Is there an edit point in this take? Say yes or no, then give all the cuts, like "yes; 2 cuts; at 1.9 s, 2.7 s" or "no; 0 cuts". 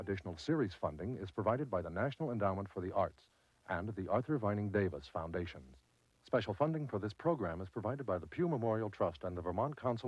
no; 0 cuts